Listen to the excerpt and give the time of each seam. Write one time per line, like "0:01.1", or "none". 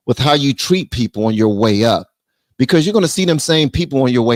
none

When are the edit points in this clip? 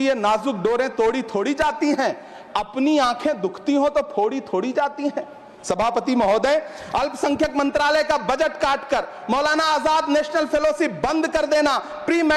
none

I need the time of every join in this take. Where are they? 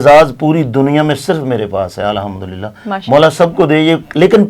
none

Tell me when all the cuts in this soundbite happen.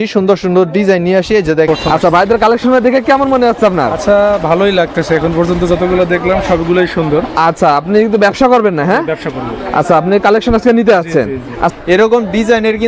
0:01.7
0:11.7

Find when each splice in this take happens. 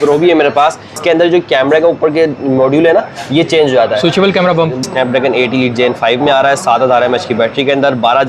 0:00.9
0:04.9

